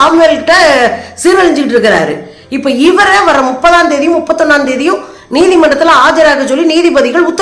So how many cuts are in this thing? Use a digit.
0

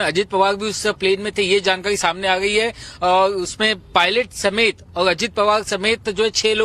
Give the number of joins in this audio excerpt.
1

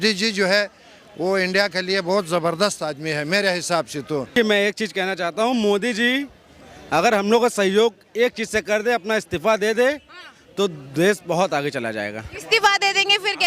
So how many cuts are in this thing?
1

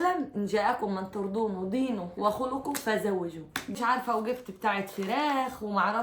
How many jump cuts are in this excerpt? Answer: 1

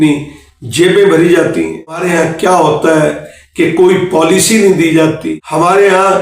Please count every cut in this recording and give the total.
2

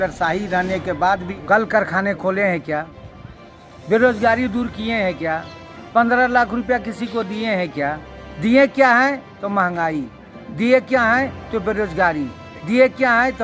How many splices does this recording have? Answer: 1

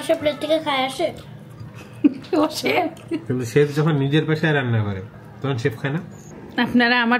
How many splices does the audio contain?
1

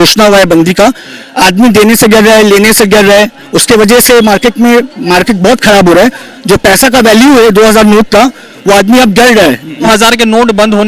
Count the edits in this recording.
1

